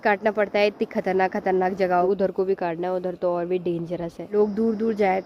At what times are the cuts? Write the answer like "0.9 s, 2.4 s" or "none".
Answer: 2.0 s, 4.2 s